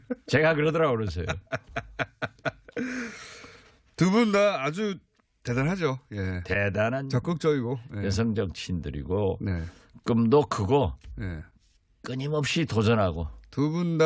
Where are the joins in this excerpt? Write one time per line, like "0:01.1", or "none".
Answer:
0:08.0